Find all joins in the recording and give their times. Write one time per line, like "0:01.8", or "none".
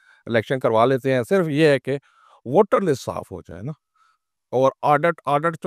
none